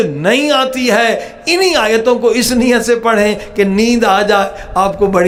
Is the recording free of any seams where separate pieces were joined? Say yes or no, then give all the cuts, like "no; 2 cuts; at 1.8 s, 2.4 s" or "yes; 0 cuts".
yes; 0 cuts